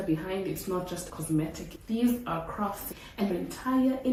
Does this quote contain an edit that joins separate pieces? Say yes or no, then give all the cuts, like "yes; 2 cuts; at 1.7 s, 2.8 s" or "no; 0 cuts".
no; 0 cuts